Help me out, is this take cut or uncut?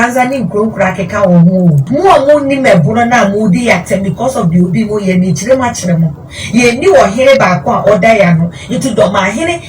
cut